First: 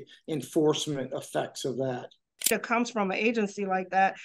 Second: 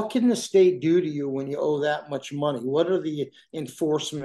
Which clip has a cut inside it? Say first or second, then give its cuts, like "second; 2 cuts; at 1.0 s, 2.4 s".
first; 1 cut; at 2.5 s